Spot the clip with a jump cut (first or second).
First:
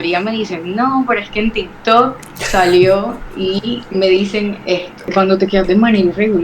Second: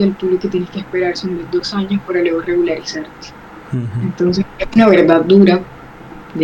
first